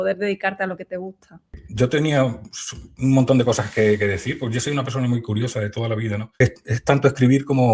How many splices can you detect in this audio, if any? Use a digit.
2